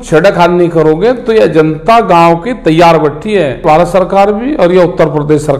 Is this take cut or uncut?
cut